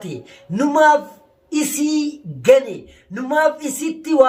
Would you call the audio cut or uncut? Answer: uncut